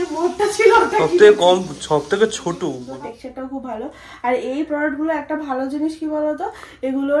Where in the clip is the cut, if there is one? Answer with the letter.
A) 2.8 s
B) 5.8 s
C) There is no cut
A